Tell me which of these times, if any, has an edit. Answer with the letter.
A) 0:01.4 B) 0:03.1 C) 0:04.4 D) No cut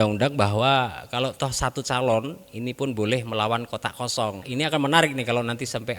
C